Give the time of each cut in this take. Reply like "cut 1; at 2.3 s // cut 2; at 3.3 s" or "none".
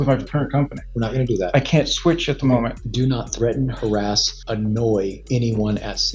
cut 1; at 2.8 s // cut 2; at 4.3 s // cut 3; at 5.2 s